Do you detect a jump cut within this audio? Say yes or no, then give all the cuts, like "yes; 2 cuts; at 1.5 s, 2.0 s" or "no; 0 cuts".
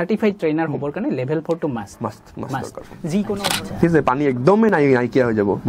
yes; 1 cut; at 3.5 s